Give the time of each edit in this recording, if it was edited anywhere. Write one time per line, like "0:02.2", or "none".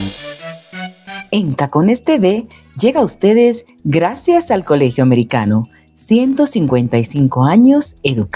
0:01.1